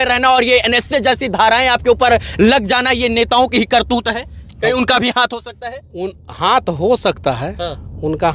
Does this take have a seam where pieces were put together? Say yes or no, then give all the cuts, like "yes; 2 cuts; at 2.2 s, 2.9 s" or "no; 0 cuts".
no; 0 cuts